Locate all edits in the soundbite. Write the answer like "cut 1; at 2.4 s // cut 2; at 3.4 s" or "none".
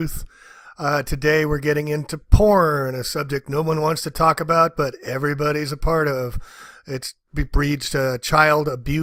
none